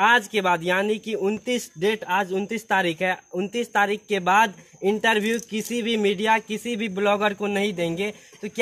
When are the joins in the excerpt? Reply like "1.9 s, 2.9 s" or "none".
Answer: none